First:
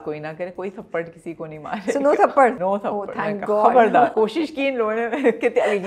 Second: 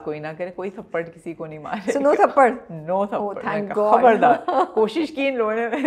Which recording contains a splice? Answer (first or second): first